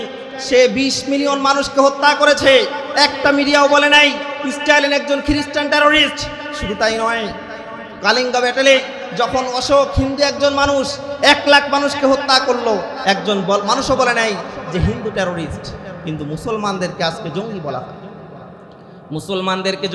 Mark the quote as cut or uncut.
uncut